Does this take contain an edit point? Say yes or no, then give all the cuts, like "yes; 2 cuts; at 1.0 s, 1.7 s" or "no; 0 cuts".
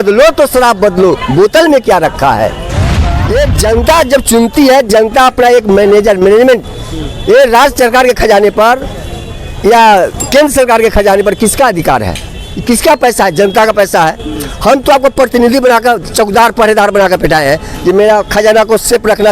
yes; 1 cut; at 3.2 s